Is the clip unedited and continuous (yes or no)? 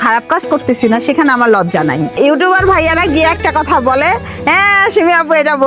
no